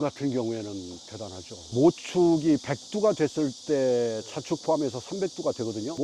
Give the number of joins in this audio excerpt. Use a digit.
0